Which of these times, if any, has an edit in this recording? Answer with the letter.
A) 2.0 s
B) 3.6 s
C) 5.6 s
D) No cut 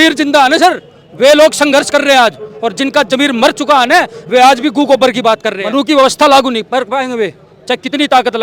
C